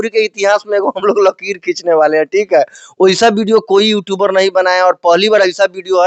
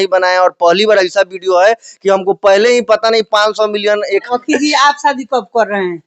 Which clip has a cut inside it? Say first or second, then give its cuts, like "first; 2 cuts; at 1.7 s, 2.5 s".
second; 1 cut; at 4.2 s